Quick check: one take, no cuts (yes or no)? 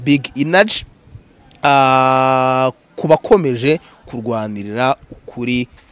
yes